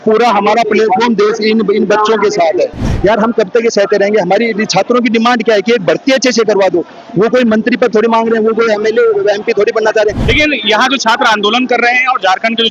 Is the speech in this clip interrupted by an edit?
yes; 2 cuts; at 2.9 s, 10.2 s

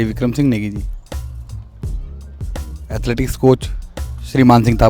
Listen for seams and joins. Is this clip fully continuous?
yes; 0 cuts

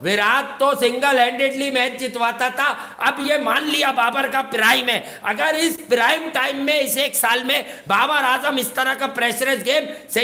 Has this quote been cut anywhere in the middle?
no; 0 cuts

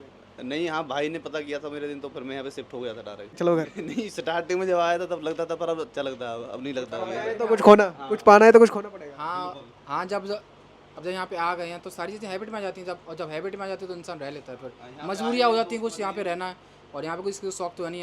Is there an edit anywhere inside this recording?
yes; 1 cut; at 3.4 s

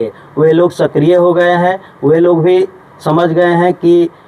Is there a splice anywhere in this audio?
no; 0 cuts

